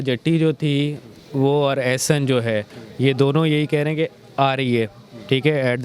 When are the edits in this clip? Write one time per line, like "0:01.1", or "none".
none

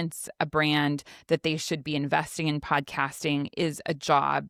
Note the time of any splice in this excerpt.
none

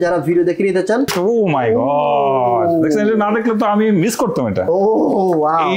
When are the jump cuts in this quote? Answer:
0:01.1

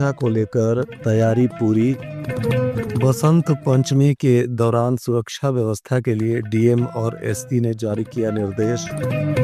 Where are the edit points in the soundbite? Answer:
none

